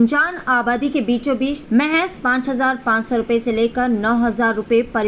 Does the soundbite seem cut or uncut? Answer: cut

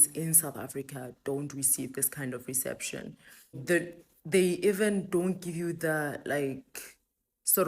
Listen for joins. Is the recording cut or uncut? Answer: cut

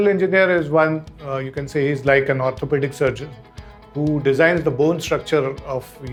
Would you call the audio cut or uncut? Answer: uncut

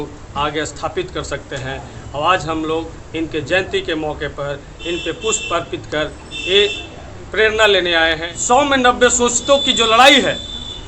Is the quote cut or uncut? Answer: cut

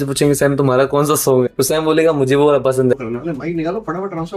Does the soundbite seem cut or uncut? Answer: cut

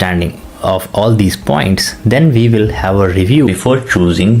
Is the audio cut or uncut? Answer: cut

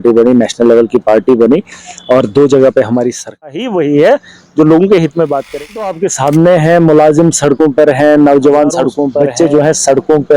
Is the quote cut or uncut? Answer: cut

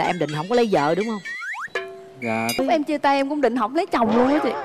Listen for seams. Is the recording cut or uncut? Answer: cut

